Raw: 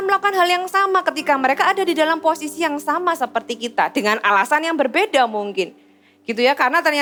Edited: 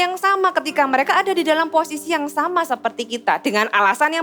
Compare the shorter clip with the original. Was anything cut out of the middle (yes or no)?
no